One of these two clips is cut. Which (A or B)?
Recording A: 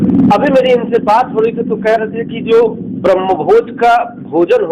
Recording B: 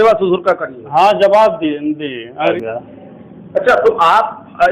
B